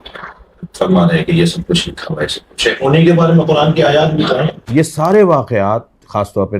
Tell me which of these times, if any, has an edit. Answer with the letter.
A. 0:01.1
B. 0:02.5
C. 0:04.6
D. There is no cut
C